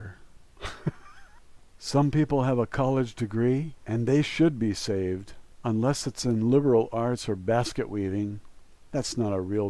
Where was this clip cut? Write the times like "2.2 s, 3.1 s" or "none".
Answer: 6.4 s